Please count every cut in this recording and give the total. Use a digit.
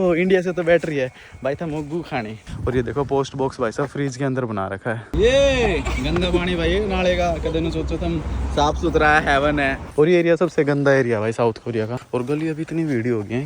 4